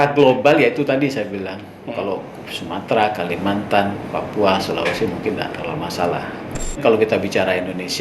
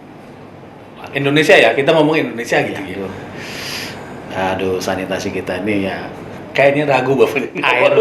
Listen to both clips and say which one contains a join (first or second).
first